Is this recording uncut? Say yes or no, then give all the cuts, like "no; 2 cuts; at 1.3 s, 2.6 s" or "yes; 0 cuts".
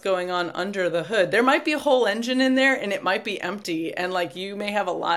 yes; 0 cuts